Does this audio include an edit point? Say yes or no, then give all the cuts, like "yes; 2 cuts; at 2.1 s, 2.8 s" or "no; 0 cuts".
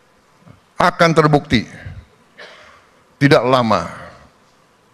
no; 0 cuts